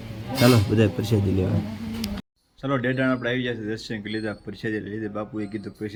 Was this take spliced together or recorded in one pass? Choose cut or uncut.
uncut